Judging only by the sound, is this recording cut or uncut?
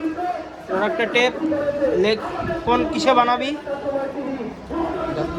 uncut